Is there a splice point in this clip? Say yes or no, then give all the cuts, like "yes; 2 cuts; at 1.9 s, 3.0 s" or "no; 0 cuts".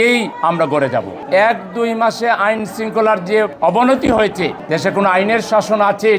yes; 3 cuts; at 1.2 s, 3.5 s, 4.6 s